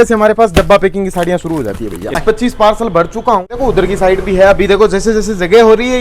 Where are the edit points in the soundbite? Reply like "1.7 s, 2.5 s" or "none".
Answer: 2.2 s, 3.5 s